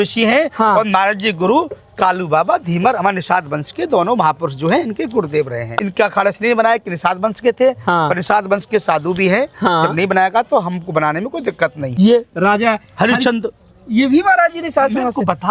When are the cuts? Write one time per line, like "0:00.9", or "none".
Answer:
0:05.7
0:11.9